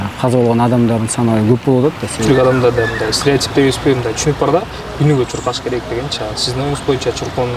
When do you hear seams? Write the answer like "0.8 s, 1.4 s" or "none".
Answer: 2.1 s